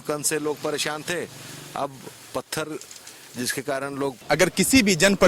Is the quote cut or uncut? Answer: cut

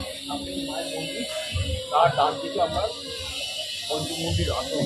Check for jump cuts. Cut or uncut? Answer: uncut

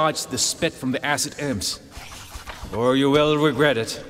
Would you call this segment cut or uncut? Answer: uncut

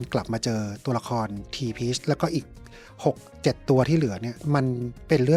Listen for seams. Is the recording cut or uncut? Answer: uncut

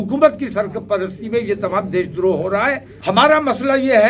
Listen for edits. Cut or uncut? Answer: cut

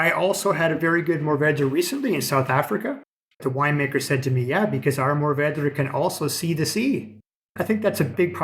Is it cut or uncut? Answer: cut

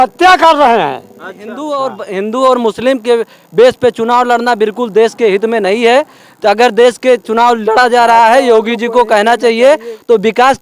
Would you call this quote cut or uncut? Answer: cut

